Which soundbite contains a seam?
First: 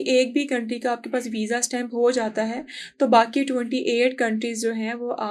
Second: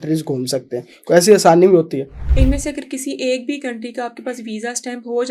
second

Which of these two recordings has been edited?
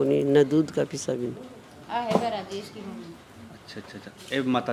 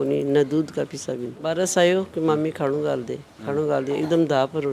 second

